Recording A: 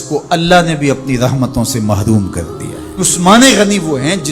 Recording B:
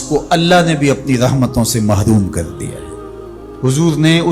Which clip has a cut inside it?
A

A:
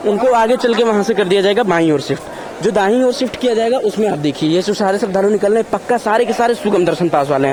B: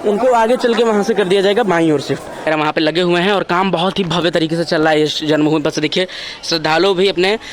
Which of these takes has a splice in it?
B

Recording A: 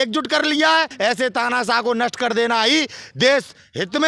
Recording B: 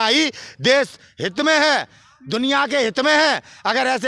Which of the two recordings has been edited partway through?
A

